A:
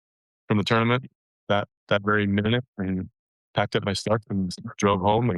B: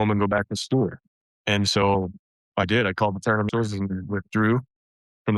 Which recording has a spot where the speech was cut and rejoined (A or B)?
B